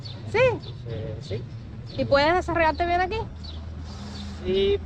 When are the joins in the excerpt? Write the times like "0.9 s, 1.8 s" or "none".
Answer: none